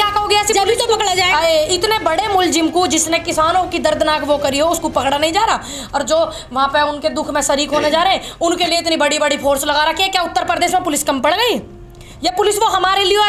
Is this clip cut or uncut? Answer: uncut